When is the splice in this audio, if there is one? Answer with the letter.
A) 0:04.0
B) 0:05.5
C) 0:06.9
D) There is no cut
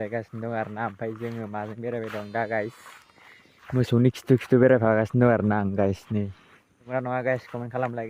C